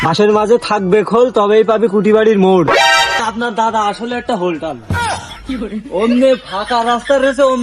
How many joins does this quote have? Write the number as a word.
one